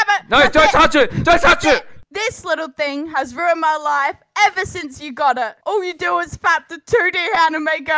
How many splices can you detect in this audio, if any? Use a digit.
1